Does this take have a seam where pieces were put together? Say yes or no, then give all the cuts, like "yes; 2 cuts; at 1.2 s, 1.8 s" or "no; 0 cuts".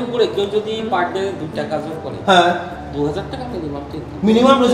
no; 0 cuts